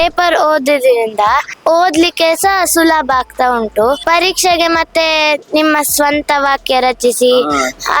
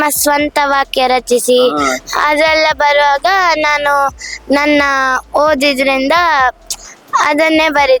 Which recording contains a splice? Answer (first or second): first